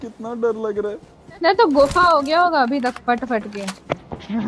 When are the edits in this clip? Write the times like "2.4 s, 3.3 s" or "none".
none

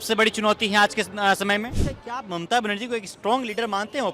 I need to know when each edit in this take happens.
1.9 s

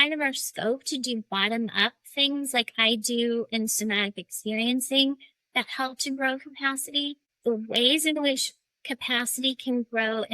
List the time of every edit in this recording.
7.3 s

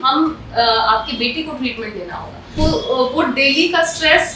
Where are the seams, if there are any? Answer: 2.6 s

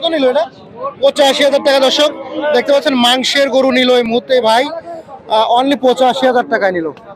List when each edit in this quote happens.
none

